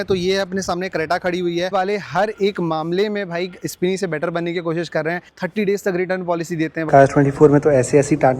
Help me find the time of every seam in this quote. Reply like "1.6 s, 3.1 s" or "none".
1.7 s, 5.3 s, 6.9 s